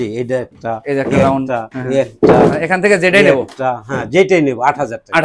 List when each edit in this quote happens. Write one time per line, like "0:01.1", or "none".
none